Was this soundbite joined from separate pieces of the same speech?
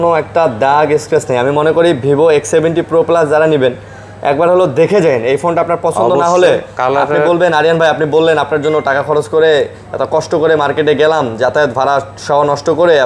no; 0 cuts

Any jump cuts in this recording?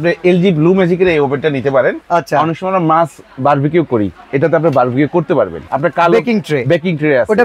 yes; 2 cuts; at 2.0 s, 5.6 s

